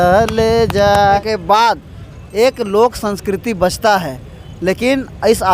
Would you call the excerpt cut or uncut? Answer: cut